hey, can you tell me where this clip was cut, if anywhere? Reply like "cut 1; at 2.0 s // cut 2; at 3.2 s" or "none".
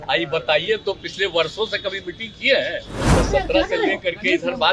cut 1; at 2.9 s